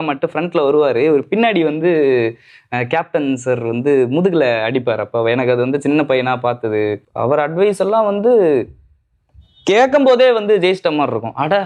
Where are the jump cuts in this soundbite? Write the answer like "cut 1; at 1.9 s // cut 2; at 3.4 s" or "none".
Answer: cut 1; at 7.1 s